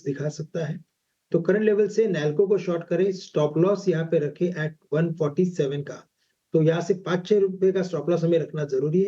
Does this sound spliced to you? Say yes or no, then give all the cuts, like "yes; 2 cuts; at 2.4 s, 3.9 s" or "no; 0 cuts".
yes; 1 cut; at 6.8 s